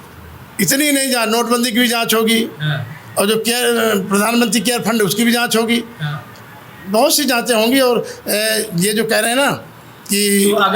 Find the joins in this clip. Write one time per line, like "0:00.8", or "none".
none